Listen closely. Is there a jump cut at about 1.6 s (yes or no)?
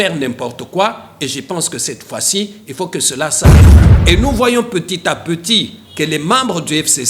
no